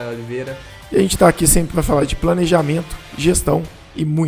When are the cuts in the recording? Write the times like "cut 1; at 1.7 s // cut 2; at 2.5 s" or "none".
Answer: none